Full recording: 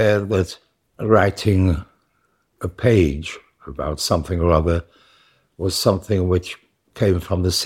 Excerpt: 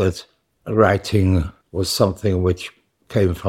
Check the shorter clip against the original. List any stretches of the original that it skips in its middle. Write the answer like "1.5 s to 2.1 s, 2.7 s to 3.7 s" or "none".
1.9 s to 5.4 s